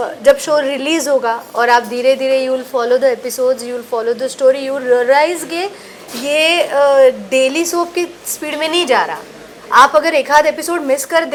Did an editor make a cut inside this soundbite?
no; 0 cuts

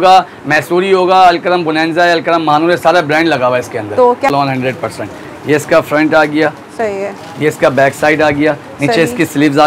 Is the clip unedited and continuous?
no; 1 cut; at 4.3 s

